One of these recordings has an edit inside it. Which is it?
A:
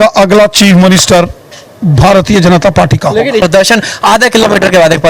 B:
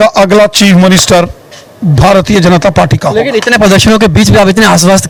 A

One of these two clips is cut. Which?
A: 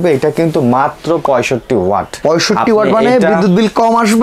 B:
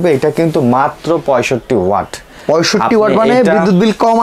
A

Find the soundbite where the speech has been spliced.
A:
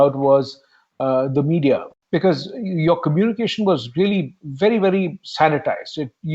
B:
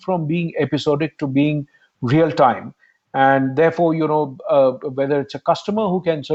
A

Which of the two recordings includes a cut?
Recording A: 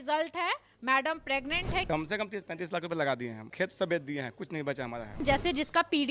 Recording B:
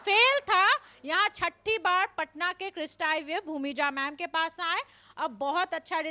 A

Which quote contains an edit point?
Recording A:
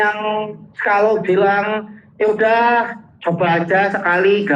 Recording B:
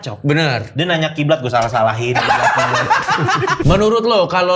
B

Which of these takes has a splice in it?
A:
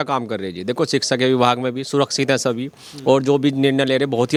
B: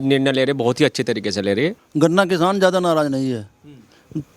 B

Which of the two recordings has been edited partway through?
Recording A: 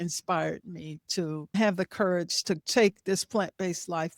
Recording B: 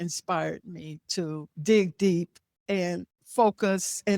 A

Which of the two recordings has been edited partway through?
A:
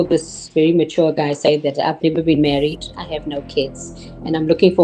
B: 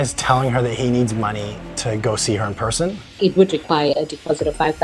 B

